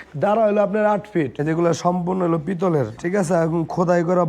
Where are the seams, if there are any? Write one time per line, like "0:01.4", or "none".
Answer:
0:01.3
0:03.0